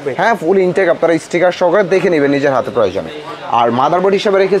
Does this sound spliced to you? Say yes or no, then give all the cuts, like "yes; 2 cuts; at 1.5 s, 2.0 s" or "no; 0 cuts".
no; 0 cuts